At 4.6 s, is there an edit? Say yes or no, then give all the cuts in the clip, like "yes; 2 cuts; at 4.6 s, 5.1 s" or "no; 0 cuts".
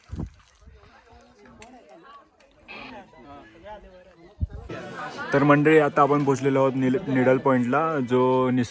yes; 1 cut; at 4.6 s